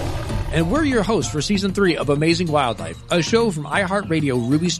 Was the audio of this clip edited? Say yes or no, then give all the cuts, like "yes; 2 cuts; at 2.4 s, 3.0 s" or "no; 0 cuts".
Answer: no; 0 cuts